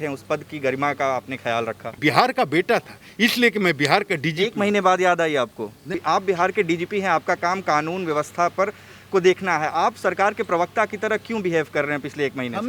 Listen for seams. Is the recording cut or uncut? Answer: cut